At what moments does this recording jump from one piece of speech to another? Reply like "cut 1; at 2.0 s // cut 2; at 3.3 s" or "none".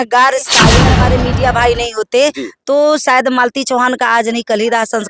cut 1; at 0.9 s